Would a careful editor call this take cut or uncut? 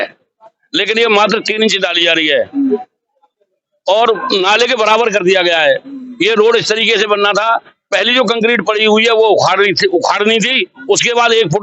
uncut